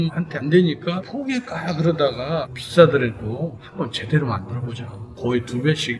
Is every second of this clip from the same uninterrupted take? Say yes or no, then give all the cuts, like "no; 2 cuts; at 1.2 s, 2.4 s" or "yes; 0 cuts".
yes; 0 cuts